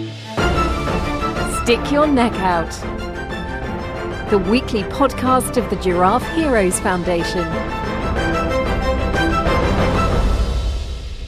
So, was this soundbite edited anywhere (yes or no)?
no